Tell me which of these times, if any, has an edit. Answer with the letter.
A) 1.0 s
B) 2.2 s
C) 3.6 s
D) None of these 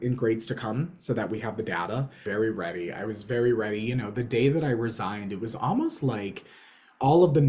B